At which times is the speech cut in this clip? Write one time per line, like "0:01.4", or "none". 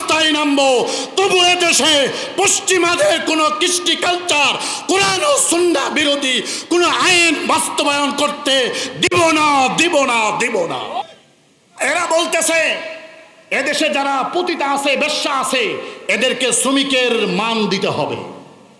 0:11.0